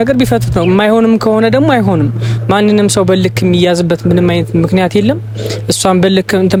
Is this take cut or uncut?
uncut